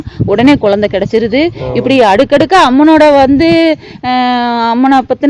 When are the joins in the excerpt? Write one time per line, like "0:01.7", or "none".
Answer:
none